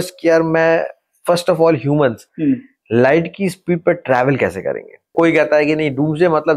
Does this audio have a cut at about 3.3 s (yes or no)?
no